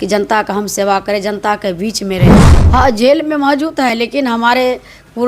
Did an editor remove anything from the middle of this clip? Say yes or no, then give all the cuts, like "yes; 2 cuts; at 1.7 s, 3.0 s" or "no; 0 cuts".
yes; 1 cut; at 2.3 s